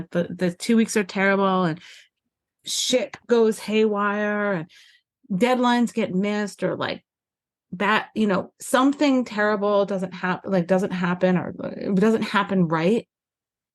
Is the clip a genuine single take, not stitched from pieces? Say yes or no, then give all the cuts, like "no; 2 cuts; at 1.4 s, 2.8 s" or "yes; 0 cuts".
yes; 0 cuts